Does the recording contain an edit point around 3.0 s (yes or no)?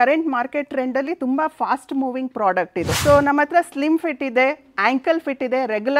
yes